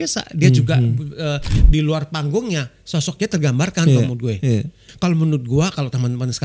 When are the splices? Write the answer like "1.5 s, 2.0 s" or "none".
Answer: 1.6 s, 4.8 s

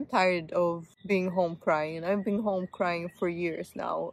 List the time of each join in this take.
0.9 s

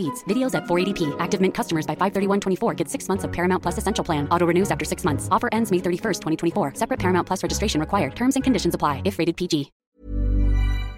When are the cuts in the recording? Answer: 9.8 s

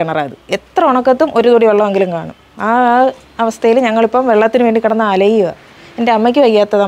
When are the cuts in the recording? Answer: none

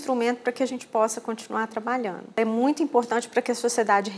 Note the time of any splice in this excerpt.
2.4 s

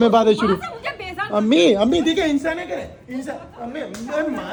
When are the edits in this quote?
none

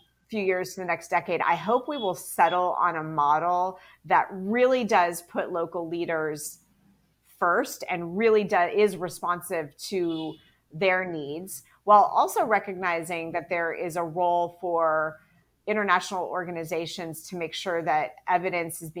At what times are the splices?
none

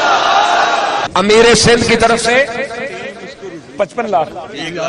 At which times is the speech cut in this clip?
1.1 s

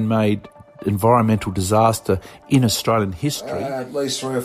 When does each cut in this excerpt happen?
3.4 s

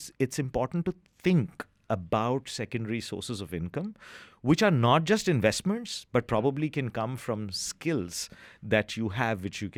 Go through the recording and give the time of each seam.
none

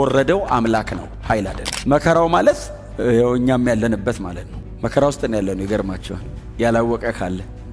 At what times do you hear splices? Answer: 1.7 s

